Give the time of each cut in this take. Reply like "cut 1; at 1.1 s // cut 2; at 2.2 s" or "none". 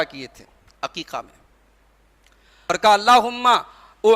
cut 1; at 2.6 s